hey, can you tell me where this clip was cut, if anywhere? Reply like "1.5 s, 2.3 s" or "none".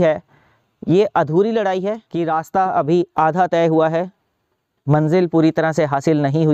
2.0 s